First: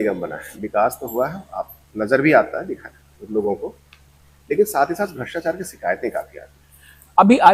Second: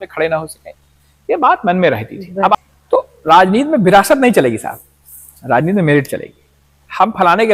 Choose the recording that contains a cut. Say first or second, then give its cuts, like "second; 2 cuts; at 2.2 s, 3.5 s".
second; 1 cut; at 2.5 s